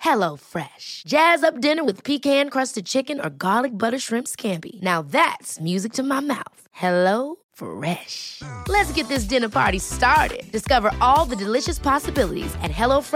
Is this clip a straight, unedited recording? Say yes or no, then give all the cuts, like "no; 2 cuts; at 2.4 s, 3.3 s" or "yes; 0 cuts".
yes; 0 cuts